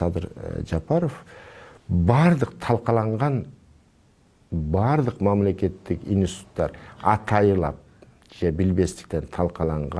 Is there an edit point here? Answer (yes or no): no